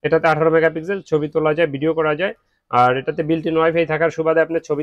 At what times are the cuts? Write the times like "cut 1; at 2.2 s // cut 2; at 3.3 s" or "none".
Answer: none